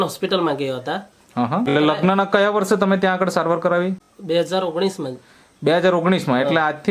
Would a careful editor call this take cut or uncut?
cut